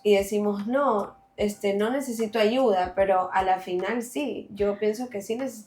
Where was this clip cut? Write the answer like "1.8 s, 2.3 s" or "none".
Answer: none